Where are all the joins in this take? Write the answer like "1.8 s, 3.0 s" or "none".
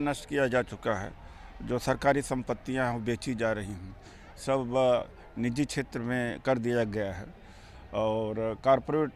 none